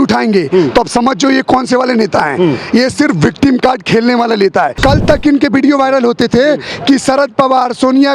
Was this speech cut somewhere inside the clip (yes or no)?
yes